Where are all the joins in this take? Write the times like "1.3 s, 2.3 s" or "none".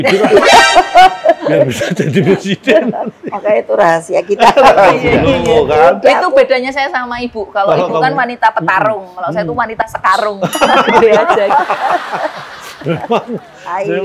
5.0 s

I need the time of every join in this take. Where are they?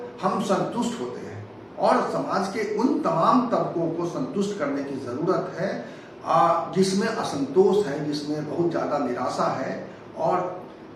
none

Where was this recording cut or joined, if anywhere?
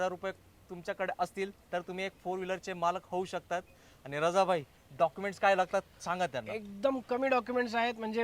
none

